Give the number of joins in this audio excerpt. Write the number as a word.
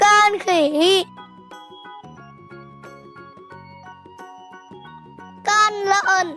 three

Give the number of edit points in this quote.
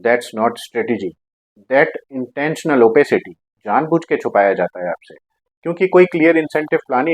zero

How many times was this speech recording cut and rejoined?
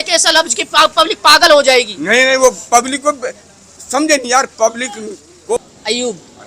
one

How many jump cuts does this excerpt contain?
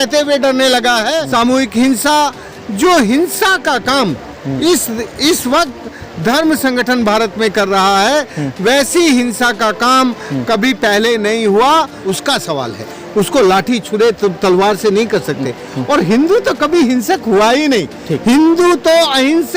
two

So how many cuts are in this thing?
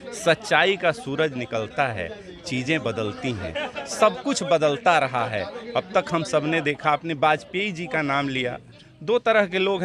zero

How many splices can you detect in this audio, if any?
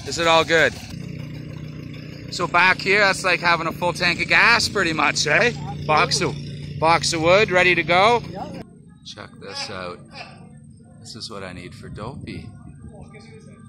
two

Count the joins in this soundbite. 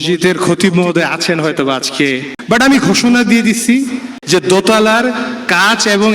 two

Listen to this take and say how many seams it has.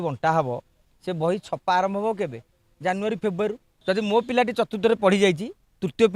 one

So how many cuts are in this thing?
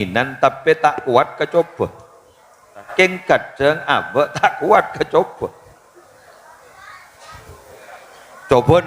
one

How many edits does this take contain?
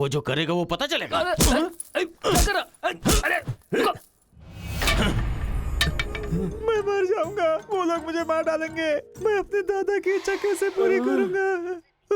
one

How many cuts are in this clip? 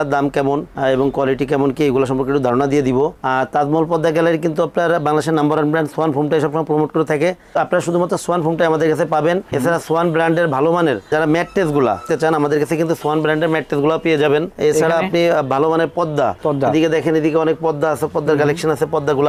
zero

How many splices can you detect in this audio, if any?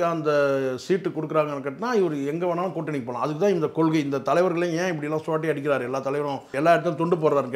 one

